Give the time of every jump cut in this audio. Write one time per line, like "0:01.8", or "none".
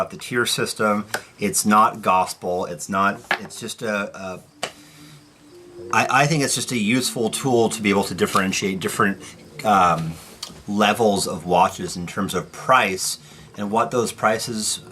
0:13.1